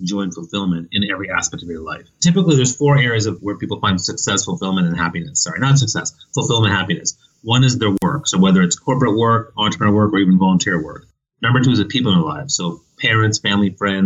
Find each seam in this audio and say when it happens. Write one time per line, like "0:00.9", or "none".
0:02.1
0:03.4